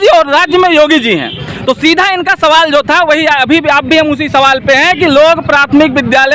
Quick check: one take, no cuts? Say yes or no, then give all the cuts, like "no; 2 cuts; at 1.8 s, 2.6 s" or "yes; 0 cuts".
yes; 0 cuts